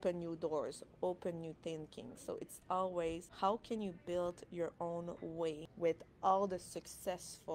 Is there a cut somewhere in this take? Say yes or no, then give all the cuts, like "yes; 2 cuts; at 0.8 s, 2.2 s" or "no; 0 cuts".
yes; 2 cuts; at 3.3 s, 5.7 s